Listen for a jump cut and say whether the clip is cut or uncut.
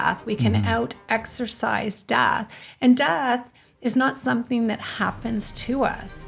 uncut